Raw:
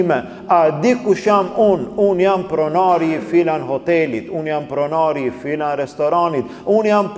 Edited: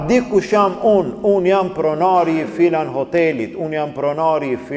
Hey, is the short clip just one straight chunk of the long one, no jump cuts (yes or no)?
yes